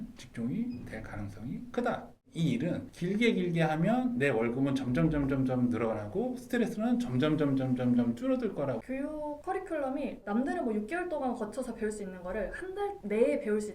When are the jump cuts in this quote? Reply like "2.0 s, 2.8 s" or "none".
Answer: 2.3 s, 8.8 s